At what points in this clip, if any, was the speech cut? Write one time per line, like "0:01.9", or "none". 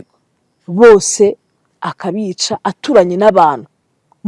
none